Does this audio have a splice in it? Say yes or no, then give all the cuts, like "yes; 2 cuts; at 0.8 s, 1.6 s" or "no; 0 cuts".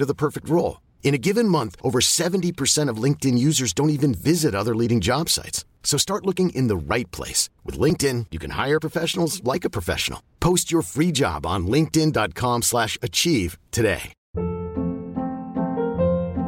yes; 1 cut; at 14.2 s